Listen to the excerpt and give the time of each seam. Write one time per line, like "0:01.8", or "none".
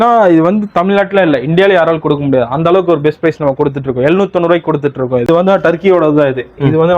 0:05.3